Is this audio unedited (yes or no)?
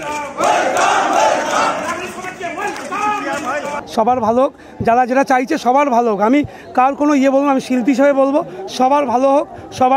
no